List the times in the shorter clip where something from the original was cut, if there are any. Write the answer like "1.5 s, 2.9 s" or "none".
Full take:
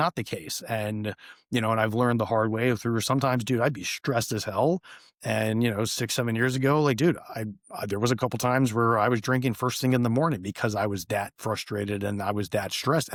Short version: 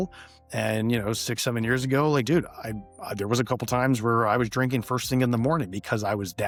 none

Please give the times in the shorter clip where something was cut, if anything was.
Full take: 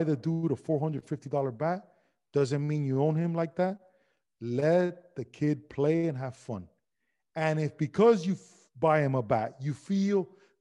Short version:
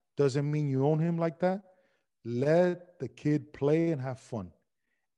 none

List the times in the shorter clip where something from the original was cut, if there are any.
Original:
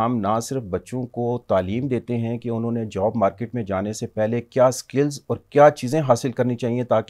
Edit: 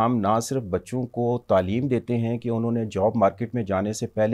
none

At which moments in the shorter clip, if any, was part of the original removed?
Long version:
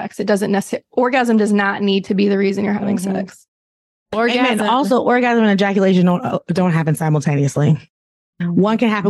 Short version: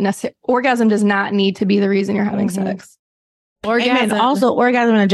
none

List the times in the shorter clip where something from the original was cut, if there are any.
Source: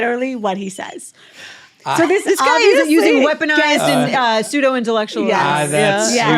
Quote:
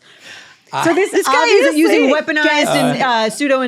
none

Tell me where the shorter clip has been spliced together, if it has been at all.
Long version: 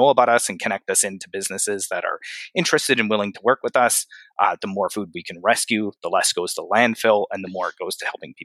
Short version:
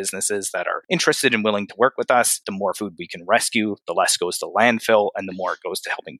0.8 s, 2.5 s

